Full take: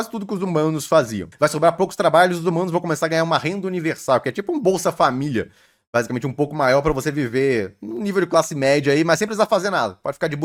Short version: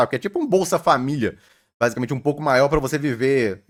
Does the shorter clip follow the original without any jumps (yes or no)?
yes